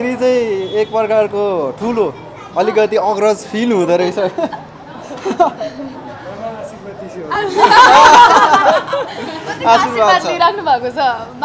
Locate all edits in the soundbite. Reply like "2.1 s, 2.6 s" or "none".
none